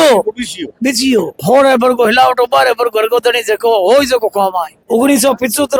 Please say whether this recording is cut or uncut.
cut